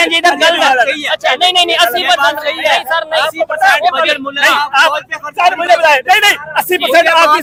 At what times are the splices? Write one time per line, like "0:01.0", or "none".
none